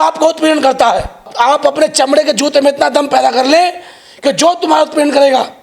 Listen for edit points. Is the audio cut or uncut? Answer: cut